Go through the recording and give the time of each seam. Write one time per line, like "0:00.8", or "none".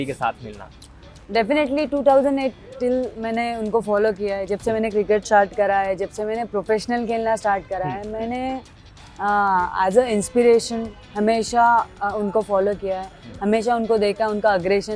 none

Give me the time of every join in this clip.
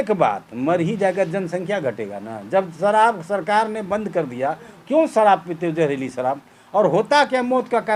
none

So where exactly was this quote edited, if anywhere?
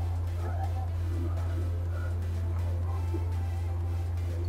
none

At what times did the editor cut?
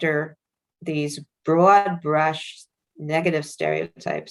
none

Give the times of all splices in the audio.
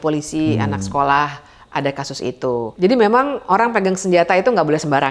0:02.7

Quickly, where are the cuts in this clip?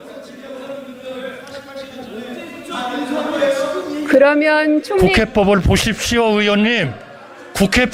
none

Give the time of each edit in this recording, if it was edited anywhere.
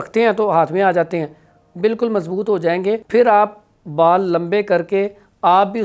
0:03.0

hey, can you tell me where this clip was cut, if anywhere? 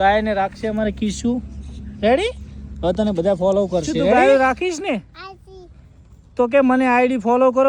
0:04.2

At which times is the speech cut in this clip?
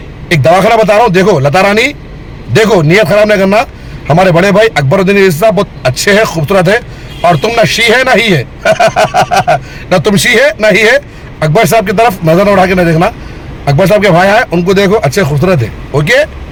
none

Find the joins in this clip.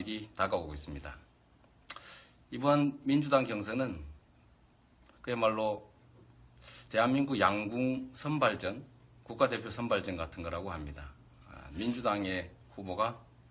0:04.6

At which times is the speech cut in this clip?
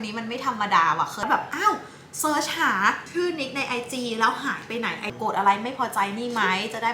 0:01.2
0:05.1

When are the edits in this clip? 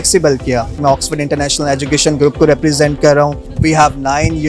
0:00.8
0:03.5

